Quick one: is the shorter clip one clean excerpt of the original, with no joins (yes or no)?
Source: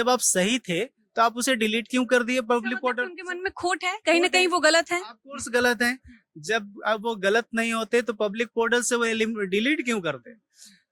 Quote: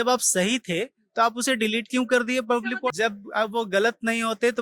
no